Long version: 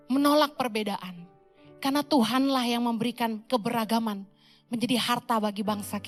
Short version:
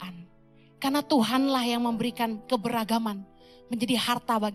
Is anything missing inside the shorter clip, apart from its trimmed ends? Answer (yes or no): no